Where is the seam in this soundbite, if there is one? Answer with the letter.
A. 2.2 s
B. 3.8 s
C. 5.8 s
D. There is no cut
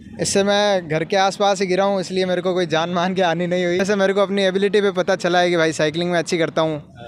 B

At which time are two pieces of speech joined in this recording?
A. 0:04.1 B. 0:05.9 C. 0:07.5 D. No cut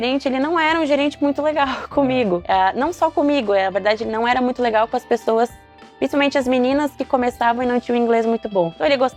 D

